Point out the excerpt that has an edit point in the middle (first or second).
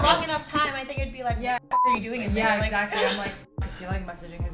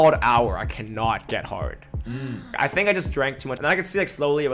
second